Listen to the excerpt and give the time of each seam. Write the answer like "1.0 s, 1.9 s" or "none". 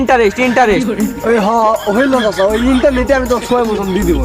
none